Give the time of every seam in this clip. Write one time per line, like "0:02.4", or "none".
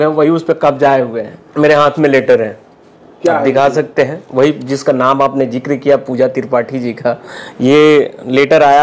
0:01.4